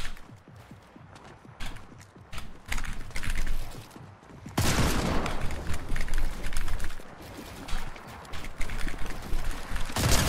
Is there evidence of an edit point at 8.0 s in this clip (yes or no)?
no